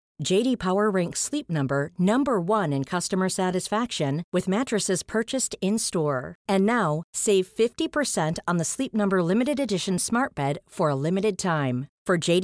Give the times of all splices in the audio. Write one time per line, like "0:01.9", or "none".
none